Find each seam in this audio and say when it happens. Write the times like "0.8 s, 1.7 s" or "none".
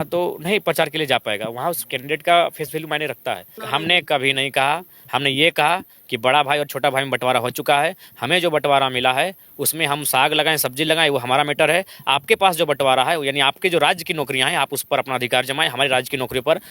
3.6 s